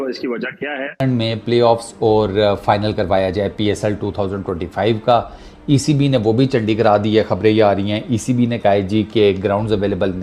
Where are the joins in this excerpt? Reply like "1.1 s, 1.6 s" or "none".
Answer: 1.0 s